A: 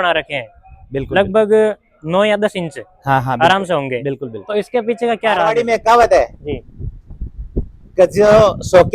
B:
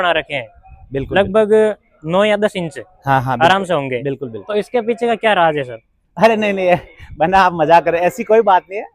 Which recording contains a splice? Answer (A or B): A